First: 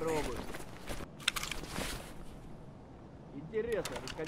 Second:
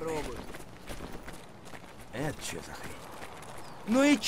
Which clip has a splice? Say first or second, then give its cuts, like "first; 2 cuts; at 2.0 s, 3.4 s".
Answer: first; 1 cut; at 1.0 s